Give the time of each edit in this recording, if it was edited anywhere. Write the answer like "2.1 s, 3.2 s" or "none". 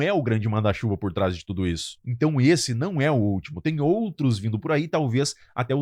1.9 s